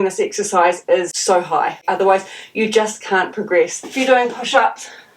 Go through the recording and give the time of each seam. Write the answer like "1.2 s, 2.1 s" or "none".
1.5 s, 3.8 s